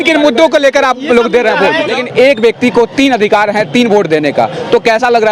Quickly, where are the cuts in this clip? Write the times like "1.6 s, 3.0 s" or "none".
2.0 s